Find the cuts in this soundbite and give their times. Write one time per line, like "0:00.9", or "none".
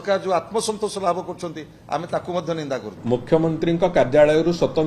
0:02.9